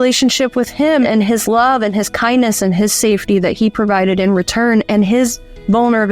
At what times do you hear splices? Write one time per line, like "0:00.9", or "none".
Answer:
0:01.1